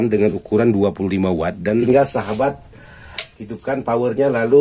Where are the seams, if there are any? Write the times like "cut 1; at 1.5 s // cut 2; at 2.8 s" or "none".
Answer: cut 1; at 1.8 s